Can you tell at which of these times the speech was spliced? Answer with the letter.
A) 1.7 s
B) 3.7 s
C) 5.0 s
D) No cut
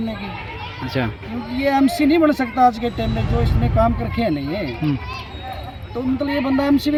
D